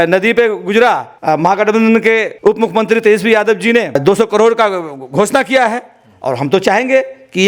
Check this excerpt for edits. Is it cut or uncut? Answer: cut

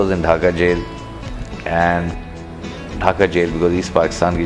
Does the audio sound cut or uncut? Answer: uncut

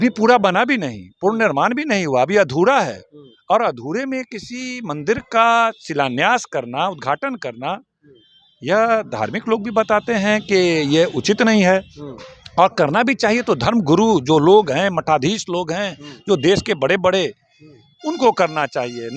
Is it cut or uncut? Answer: uncut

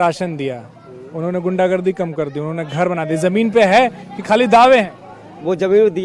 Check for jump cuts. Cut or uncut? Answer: uncut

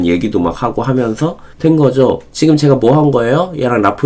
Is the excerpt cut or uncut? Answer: uncut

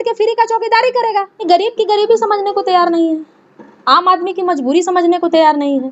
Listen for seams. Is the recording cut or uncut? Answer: cut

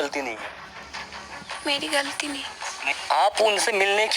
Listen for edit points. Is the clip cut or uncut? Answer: cut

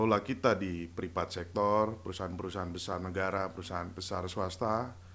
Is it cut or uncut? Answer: uncut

